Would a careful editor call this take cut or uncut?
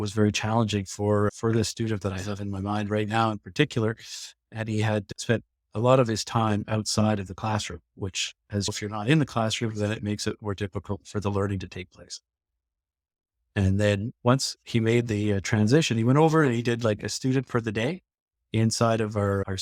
uncut